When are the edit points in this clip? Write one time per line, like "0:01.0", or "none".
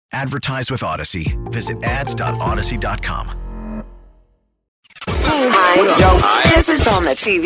0:04.8